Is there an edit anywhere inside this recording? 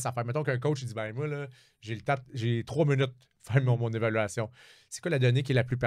no; 0 cuts

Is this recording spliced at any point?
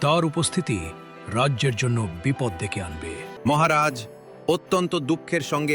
yes; 1 cut; at 3.3 s

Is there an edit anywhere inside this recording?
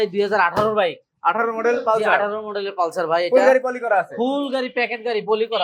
no; 0 cuts

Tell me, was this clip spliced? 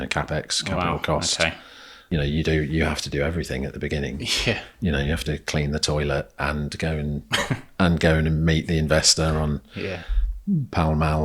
yes; 1 cut; at 2.0 s

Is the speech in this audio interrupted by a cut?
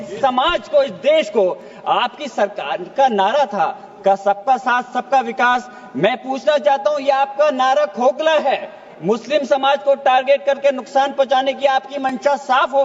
no; 0 cuts

